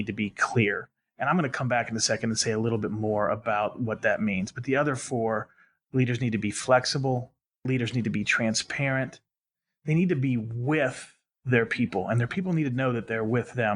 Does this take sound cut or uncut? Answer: cut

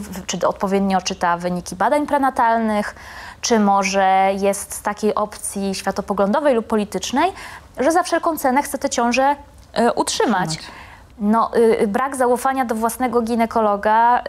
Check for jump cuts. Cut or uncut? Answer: uncut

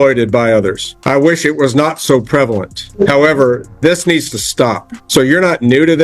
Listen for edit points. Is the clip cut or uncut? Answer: cut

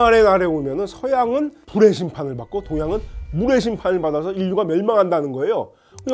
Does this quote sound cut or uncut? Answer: cut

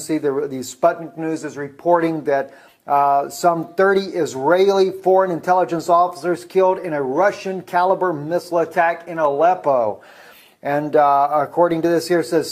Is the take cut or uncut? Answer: uncut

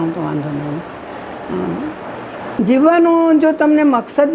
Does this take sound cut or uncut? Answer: cut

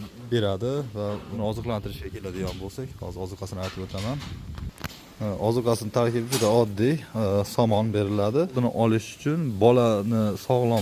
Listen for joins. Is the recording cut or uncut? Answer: cut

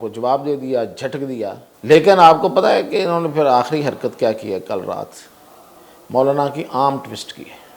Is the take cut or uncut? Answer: cut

